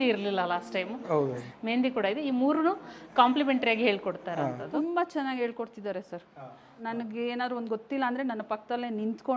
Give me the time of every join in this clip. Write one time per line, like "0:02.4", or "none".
0:01.4
0:04.6
0:06.7